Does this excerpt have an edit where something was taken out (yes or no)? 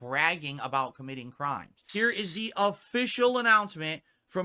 yes